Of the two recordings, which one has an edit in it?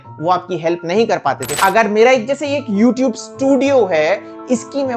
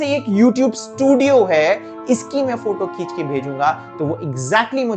first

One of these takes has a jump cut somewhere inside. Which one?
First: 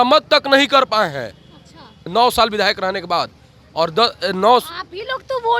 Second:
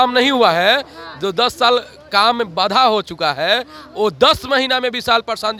first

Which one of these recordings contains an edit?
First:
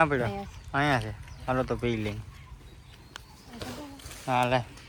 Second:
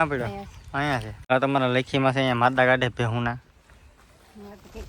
second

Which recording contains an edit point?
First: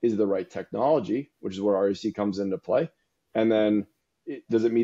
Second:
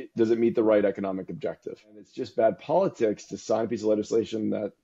second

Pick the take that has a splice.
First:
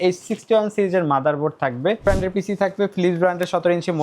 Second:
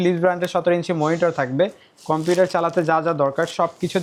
first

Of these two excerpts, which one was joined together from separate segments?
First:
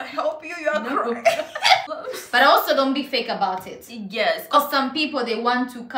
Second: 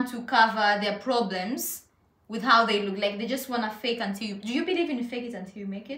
first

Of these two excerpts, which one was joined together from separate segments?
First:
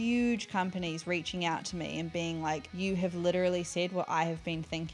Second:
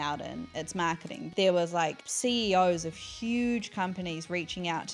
second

